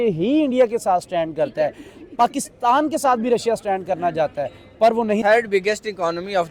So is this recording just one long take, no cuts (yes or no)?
no